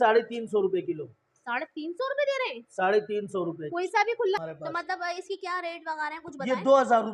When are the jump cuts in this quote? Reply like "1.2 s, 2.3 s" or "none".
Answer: 4.4 s